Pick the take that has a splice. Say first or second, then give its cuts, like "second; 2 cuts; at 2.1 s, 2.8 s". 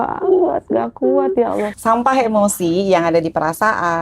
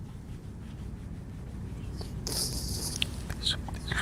first; 1 cut; at 1.8 s